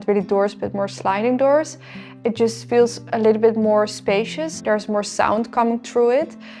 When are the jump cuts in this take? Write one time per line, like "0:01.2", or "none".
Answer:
0:04.6

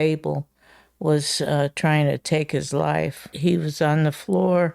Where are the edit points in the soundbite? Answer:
0:03.2

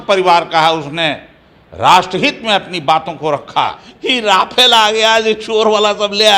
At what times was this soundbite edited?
0:03.9

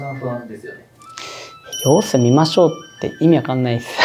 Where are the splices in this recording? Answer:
none

